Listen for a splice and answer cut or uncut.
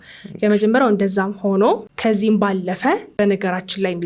cut